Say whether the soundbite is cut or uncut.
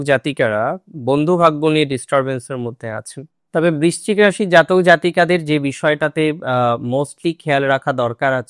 cut